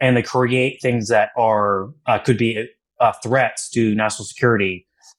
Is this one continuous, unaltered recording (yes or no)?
yes